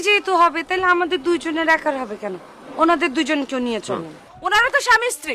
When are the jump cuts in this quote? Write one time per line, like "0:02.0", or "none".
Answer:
0:04.3

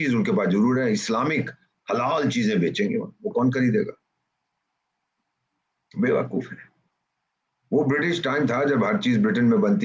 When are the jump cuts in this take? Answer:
none

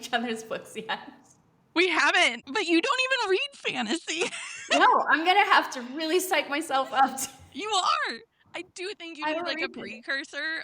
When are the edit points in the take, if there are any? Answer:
0:02.4

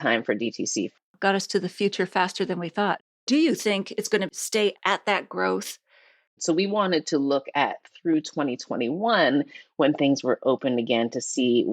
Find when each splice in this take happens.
0:01.1
0:03.0
0:04.7
0:06.3

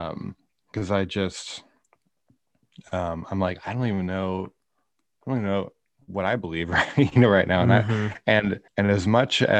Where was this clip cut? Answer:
0:08.6

